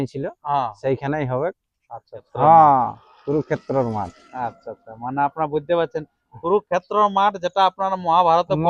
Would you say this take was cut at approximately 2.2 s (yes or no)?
yes